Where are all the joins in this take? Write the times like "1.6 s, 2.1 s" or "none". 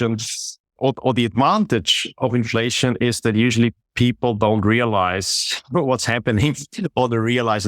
none